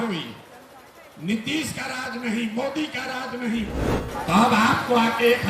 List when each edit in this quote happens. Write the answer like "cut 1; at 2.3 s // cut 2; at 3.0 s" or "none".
cut 1; at 3.7 s

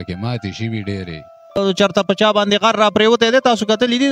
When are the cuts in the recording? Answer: cut 1; at 1.6 s

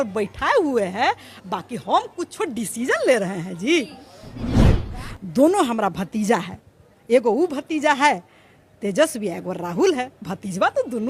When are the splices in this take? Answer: cut 1; at 4.8 s

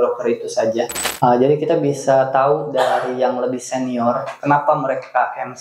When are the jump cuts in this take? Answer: cut 1; at 1.0 s

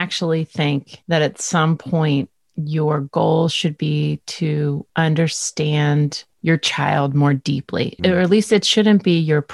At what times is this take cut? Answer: cut 1; at 0.9 s // cut 2; at 4.8 s // cut 3; at 6.3 s // cut 4; at 8.0 s

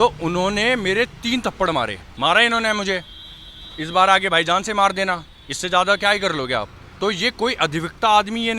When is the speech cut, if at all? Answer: cut 1; at 2.0 s // cut 2; at 6.8 s

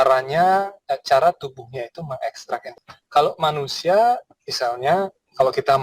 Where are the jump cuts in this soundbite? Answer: cut 1; at 2.7 s

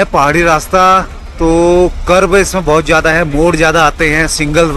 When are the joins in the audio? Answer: none

